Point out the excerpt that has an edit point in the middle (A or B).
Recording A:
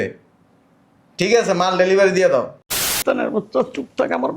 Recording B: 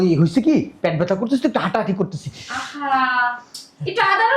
A